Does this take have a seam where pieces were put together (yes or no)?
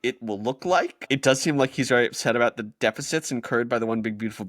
yes